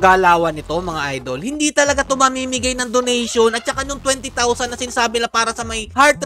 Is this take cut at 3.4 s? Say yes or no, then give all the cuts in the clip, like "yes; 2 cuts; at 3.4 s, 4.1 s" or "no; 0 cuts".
no; 0 cuts